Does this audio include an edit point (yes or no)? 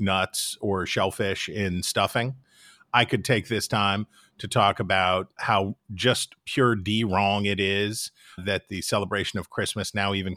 yes